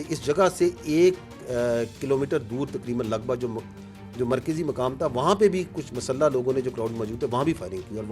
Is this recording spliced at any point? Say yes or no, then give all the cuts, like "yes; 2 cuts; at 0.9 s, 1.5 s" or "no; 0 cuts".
no; 0 cuts